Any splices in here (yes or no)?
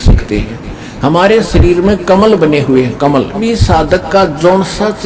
yes